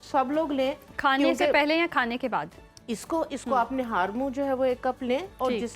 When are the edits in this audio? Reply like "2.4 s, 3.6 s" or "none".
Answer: none